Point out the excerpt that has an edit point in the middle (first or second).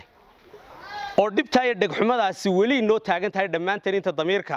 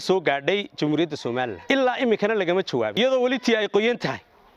second